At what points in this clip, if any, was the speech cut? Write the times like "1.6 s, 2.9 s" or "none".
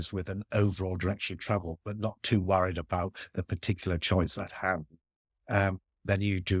none